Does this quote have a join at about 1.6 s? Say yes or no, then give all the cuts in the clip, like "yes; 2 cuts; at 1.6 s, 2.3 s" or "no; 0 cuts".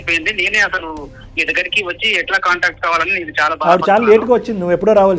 no; 1 cut; at 3.6 s